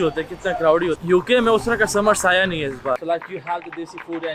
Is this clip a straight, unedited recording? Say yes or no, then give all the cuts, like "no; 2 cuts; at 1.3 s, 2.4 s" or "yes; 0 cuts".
no; 2 cuts; at 1.0 s, 3.0 s